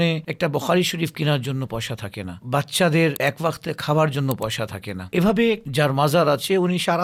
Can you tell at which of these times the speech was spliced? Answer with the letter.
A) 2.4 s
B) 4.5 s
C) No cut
C